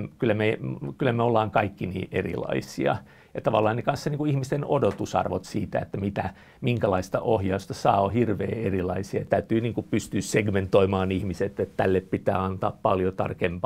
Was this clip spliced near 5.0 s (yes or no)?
no